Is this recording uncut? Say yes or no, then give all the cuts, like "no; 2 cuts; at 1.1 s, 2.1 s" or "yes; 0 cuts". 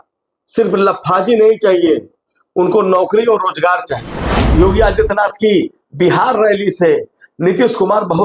no; 1 cut; at 4.4 s